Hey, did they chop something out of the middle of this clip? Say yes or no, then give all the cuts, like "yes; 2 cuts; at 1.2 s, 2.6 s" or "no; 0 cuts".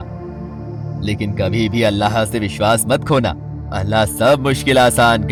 no; 0 cuts